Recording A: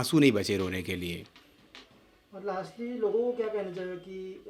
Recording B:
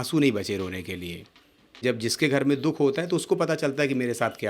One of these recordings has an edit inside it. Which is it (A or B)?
B